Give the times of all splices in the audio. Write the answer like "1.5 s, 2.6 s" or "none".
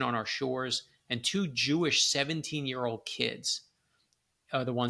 none